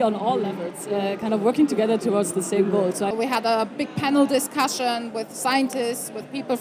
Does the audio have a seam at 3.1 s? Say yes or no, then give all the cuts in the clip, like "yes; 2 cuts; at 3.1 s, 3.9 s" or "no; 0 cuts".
yes; 1 cut; at 3.1 s